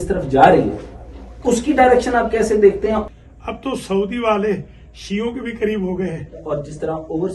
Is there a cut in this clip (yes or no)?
yes